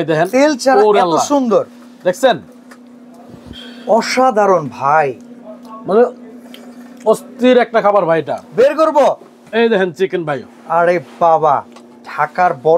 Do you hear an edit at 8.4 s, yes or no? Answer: yes